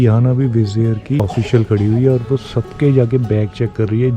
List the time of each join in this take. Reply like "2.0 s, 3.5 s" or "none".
1.2 s